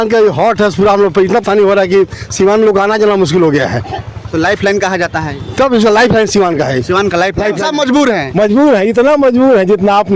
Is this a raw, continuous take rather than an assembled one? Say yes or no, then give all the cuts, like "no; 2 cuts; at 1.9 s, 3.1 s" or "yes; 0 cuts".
no; 2 cuts; at 1.4 s, 7.5 s